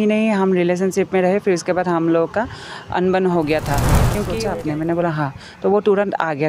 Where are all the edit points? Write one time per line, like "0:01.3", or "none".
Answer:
0:04.2